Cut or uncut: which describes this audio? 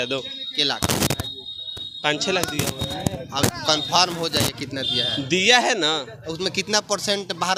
uncut